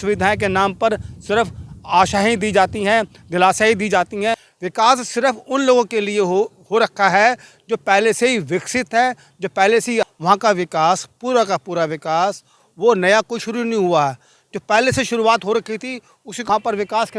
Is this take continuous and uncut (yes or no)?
no